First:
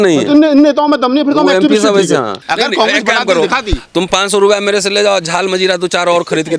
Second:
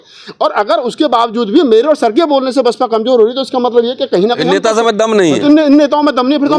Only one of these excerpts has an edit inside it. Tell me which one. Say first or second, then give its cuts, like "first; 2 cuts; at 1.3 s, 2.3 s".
first; 1 cut; at 2.4 s